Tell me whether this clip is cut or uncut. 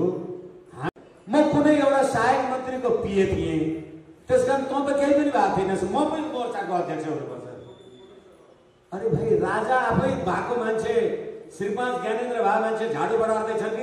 cut